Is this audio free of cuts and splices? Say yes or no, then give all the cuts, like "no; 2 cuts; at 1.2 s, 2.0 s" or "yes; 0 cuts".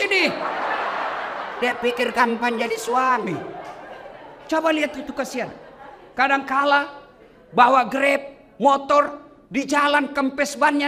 yes; 0 cuts